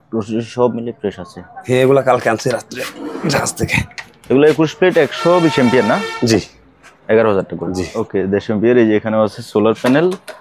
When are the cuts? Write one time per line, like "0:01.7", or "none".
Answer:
0:07.9